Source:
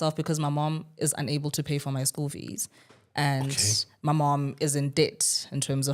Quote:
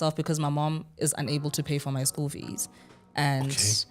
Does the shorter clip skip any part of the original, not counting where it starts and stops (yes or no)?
no